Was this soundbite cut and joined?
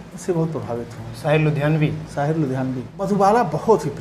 yes; 1 cut; at 3.1 s

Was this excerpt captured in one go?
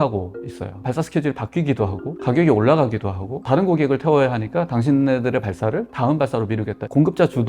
yes; 0 cuts

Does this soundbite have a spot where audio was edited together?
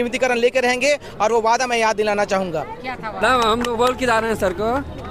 yes; 1 cut; at 3.2 s

